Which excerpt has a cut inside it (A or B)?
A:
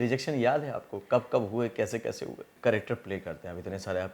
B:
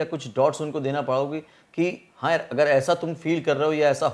A